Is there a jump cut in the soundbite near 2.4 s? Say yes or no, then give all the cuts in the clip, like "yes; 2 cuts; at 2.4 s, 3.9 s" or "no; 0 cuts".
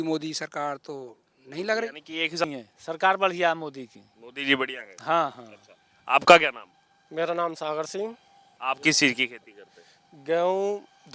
yes; 1 cut; at 2.4 s